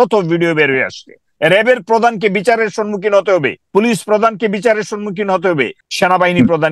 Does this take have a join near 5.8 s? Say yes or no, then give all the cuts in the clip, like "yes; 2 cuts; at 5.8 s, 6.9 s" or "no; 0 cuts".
yes; 2 cuts; at 3.6 s, 5.8 s